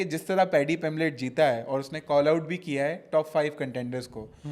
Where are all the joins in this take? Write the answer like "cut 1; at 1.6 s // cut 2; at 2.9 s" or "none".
none